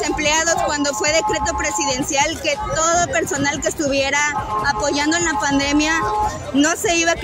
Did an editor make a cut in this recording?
no; 0 cuts

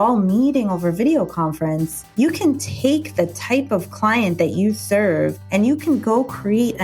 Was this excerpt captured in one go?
yes; 0 cuts

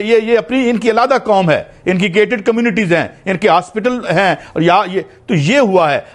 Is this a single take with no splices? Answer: yes; 0 cuts

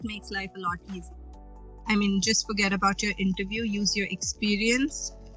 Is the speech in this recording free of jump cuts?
no; 1 cut; at 1.1 s

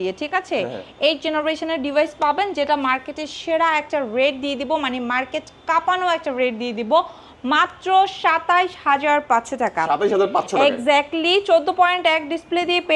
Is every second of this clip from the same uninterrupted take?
yes; 0 cuts

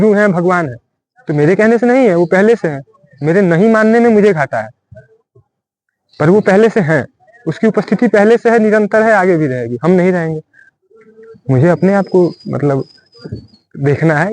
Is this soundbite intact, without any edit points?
yes; 0 cuts

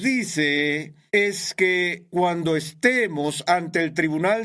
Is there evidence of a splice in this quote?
yes; 2 cuts; at 0.9 s, 2.0 s

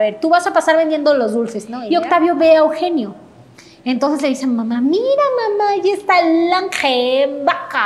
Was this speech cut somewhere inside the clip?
yes; 1 cut; at 1.7 s

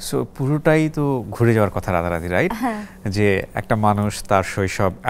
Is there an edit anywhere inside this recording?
no; 0 cuts

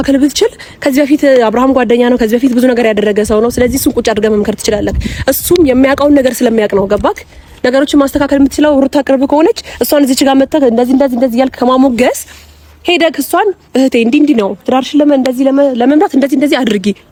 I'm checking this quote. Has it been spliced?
no; 0 cuts

